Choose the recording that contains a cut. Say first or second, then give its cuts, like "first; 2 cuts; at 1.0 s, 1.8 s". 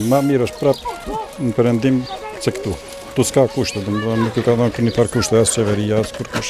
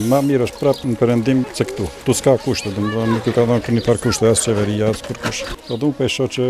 second; 3 cuts; at 0.8 s, 1.7 s, 5.5 s